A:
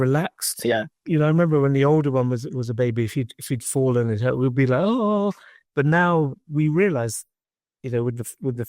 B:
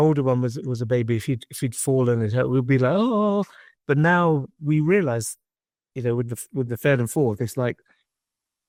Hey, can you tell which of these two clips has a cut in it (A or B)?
A